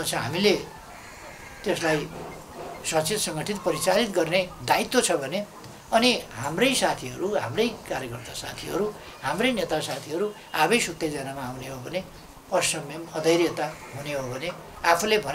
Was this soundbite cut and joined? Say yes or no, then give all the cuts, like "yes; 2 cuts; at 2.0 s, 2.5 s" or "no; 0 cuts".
no; 0 cuts